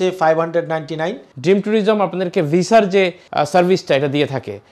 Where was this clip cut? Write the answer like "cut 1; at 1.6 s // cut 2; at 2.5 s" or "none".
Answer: cut 1; at 1.3 s // cut 2; at 3.2 s